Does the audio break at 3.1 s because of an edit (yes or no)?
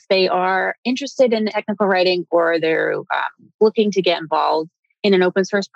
no